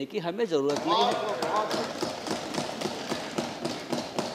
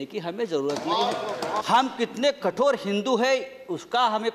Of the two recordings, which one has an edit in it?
second; 1 cut; at 1.6 s

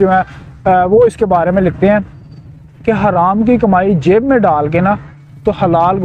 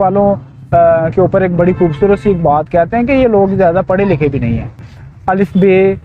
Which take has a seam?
second; 1 cut; at 4.8 s

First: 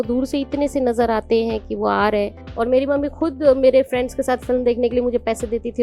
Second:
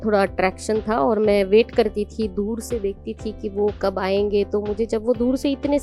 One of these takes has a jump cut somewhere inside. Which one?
first; 1 cut; at 2.4 s

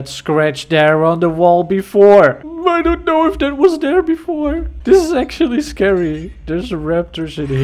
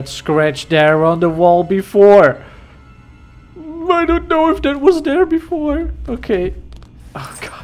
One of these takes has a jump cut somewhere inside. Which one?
first; 2 cuts; at 2.5 s, 4.7 s

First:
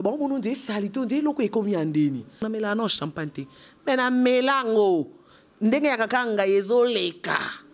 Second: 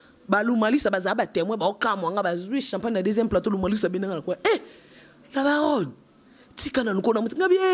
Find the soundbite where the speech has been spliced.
first; 1 cut; at 2.4 s

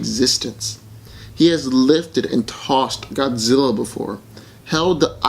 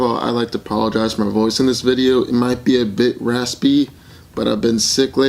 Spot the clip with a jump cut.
first; 1 cut; at 3.5 s

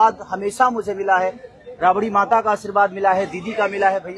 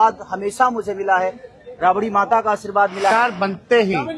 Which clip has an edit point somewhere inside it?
second; 1 cut; at 3.1 s

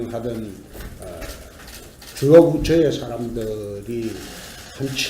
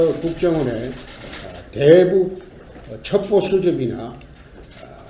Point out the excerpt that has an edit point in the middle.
first; 1 cut; at 3.0 s

